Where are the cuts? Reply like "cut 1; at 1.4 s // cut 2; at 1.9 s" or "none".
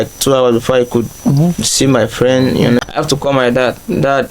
cut 1; at 2.9 s